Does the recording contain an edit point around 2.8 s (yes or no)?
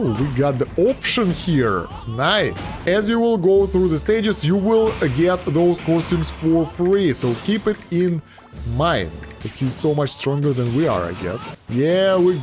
yes